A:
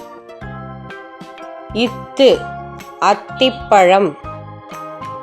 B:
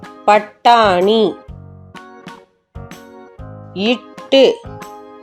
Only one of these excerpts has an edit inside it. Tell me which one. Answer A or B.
A